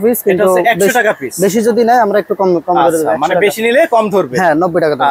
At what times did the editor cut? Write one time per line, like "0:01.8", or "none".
none